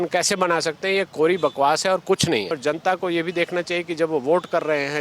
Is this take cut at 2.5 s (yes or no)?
yes